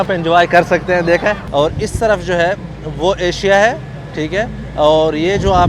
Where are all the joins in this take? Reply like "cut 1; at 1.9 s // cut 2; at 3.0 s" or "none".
cut 1; at 1.4 s